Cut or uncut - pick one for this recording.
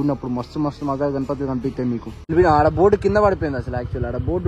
cut